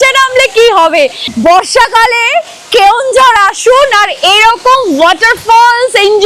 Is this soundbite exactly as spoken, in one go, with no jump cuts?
no; 1 cut; at 1.2 s

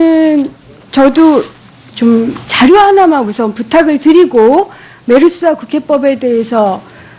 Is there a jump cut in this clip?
no; 0 cuts

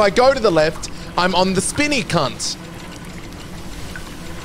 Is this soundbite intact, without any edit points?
yes; 0 cuts

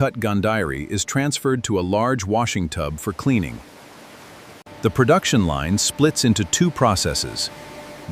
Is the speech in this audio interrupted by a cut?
no; 0 cuts

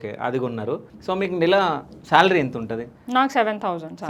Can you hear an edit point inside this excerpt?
yes; 1 cut; at 0.9 s

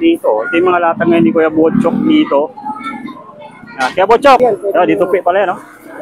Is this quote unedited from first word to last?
no; 1 cut; at 4.4 s

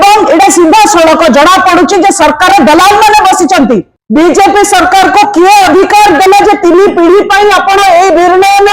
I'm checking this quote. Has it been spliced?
yes; 1 cut; at 3.9 s

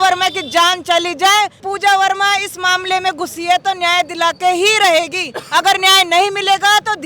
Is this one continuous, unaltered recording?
no; 1 cut; at 1.6 s

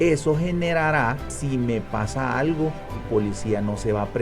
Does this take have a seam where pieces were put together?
yes; 2 cuts; at 1.3 s, 3.0 s

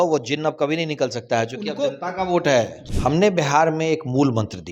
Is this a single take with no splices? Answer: no; 1 cut; at 2.8 s

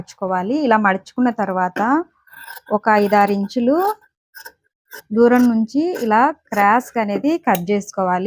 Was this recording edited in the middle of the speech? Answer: no; 0 cuts

